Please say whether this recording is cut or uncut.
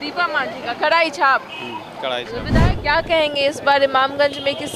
cut